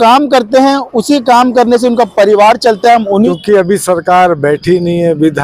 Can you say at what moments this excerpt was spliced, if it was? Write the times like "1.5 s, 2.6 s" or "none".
3.3 s

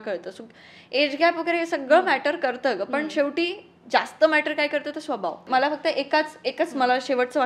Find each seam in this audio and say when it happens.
5.4 s

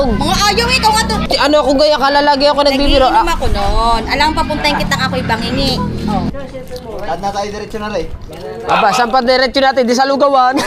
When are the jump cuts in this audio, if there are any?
1.2 s, 6.3 s

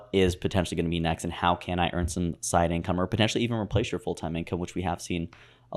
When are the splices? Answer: none

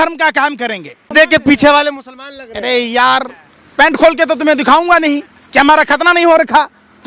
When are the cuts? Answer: 1.1 s

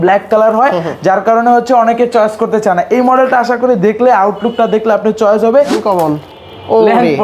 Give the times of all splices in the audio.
5.8 s

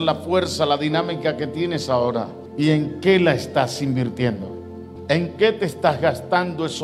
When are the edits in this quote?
2.4 s, 4.9 s

